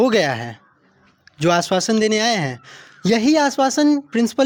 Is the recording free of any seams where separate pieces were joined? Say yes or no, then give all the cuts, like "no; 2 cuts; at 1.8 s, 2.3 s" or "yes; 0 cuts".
yes; 0 cuts